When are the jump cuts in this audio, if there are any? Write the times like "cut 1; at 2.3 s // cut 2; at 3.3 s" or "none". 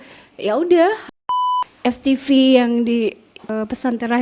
cut 1; at 1.4 s // cut 2; at 3.5 s

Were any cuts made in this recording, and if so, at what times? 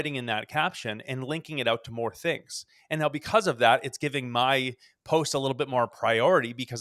none

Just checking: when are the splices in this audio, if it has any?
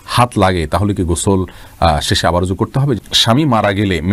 cut 1; at 3.1 s

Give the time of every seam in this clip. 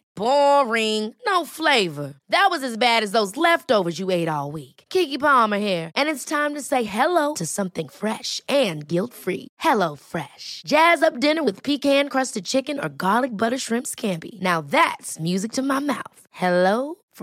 none

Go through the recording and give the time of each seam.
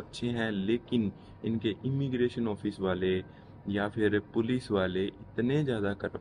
none

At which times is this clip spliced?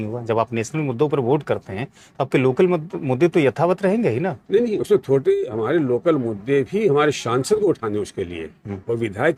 none

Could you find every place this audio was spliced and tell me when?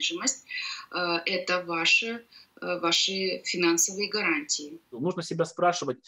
cut 1; at 5.0 s

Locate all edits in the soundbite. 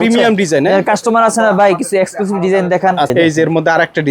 cut 1; at 3.1 s

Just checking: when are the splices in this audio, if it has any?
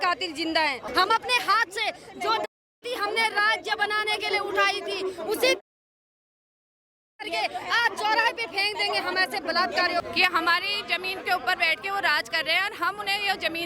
cut 1; at 0.9 s // cut 2; at 10.1 s

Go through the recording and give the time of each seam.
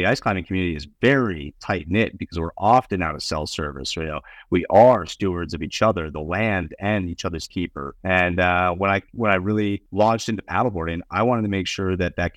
cut 1; at 7.9 s // cut 2; at 9.8 s

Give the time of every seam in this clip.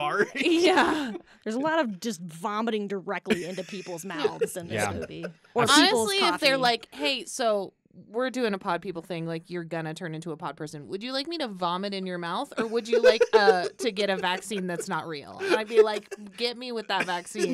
cut 1; at 1.3 s

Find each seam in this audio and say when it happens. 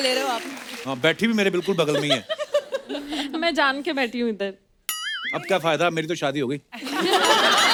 none

